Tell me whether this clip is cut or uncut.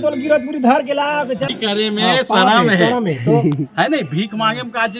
cut